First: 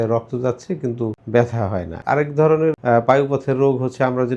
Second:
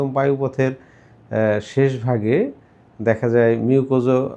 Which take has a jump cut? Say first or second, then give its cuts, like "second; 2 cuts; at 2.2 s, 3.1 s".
first; 3 cuts; at 1.2 s, 2.0 s, 2.8 s